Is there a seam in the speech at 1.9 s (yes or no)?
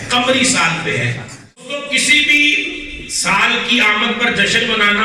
yes